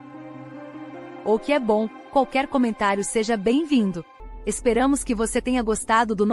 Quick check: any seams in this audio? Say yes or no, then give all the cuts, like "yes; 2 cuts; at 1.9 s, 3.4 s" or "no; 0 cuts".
yes; 1 cut; at 4.1 s